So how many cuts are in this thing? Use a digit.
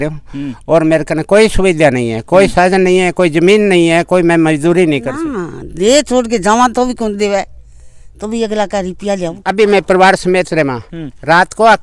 2